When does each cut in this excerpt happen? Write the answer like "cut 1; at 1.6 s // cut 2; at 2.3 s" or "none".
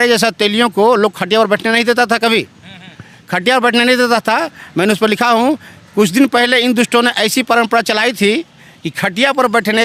none